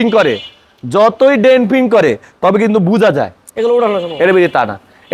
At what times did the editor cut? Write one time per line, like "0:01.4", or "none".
none